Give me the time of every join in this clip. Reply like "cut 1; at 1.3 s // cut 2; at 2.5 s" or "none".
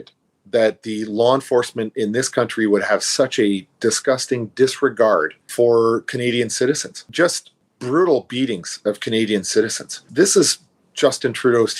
cut 1; at 5.4 s // cut 2; at 7.0 s